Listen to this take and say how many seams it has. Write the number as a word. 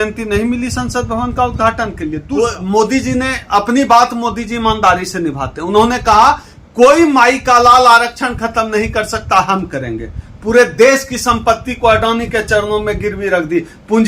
one